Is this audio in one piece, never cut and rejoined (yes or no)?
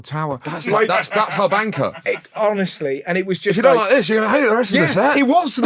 yes